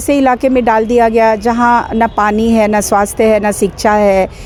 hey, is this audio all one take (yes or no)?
yes